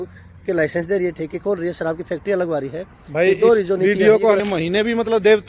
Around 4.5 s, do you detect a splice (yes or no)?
yes